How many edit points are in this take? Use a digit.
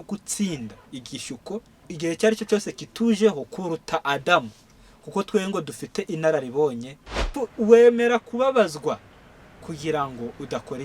2